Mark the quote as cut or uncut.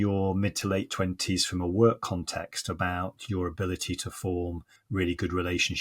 cut